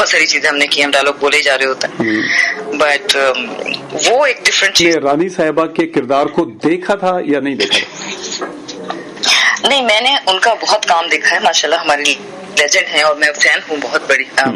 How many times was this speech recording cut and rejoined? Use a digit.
1